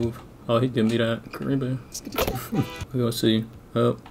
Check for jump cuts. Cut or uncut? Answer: cut